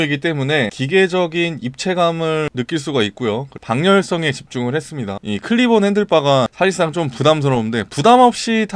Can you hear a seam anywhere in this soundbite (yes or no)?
yes